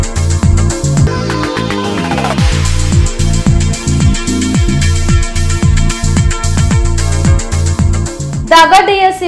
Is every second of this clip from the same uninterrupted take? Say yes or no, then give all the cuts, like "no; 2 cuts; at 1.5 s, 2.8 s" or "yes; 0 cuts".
no; 1 cut; at 8.2 s